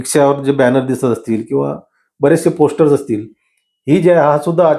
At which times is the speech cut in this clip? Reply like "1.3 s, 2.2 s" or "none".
none